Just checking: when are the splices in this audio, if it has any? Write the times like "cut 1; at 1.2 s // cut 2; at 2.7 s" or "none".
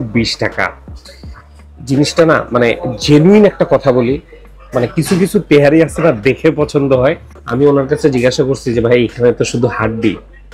cut 1; at 7.4 s